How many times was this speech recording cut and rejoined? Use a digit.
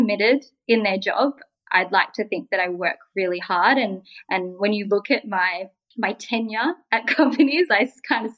0